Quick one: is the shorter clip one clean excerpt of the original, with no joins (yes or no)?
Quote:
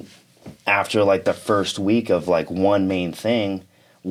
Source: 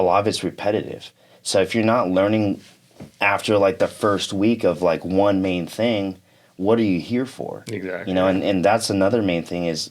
yes